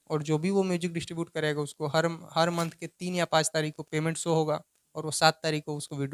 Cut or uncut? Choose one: uncut